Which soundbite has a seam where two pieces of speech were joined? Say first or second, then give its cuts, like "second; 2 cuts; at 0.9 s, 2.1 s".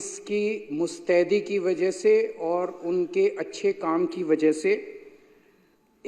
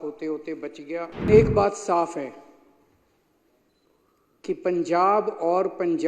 second; 1 cut; at 1.3 s